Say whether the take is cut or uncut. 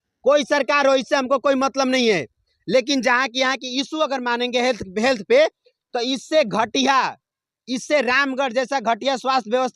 uncut